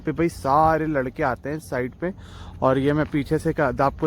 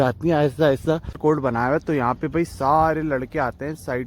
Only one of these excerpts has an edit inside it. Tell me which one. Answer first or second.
second